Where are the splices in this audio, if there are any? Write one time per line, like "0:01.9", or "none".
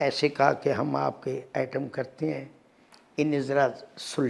none